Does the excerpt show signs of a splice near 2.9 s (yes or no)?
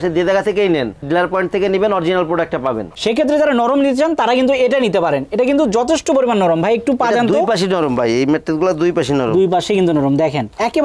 yes